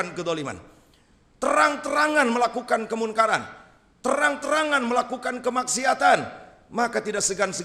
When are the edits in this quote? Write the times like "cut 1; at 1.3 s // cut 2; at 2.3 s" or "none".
none